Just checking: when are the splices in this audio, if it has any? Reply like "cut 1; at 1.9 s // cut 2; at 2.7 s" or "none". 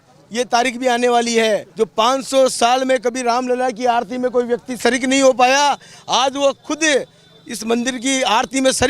cut 1; at 1.7 s